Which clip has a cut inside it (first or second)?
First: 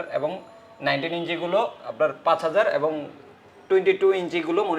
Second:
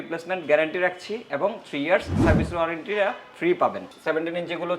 second